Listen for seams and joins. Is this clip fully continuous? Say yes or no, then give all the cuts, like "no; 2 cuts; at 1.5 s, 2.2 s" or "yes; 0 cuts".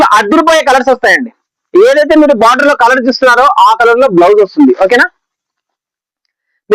yes; 0 cuts